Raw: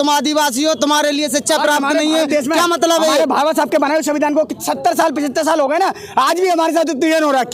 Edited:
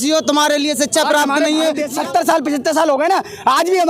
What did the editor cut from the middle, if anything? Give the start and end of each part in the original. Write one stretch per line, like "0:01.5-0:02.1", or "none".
0:02.4-0:04.6